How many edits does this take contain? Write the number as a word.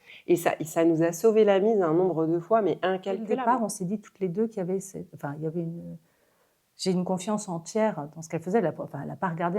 one